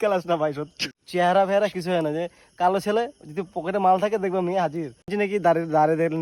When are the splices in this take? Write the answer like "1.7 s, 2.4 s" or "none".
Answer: 0.9 s, 5.1 s